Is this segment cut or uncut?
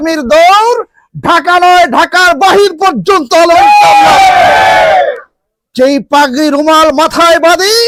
uncut